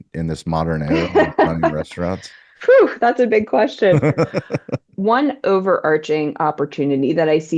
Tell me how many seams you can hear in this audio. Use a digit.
1